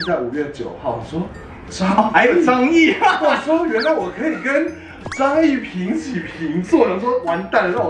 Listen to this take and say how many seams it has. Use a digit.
0